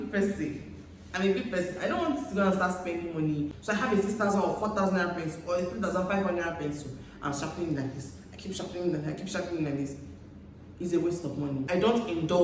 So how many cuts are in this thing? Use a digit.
2